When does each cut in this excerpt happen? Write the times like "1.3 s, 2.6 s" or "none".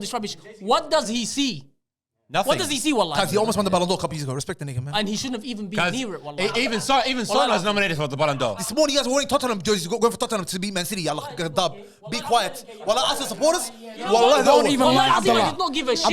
8.6 s